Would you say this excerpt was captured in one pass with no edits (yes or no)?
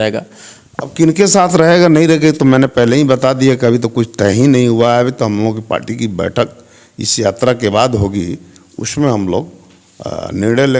yes